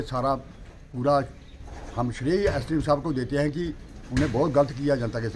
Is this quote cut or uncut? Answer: uncut